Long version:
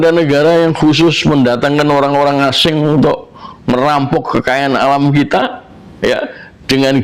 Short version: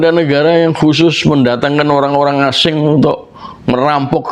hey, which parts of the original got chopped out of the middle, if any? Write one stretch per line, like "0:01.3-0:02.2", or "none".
none